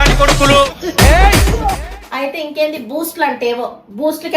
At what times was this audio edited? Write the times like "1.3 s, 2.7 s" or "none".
1.9 s